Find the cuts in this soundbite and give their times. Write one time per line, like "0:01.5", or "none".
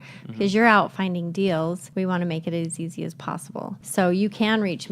0:01.8
0:03.8